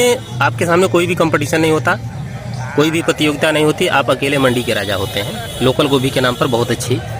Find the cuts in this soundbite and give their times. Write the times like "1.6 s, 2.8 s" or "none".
none